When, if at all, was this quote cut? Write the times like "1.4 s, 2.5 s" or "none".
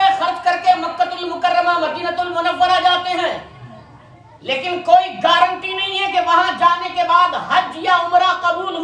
none